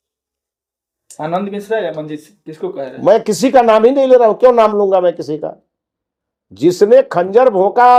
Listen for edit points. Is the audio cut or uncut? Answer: uncut